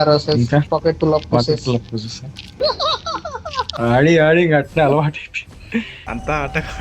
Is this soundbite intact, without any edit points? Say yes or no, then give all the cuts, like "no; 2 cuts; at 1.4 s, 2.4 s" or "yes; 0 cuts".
no; 2 cuts; at 2.5 s, 3.7 s